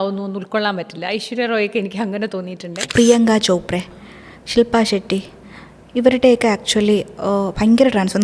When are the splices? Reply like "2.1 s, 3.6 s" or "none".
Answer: 2.8 s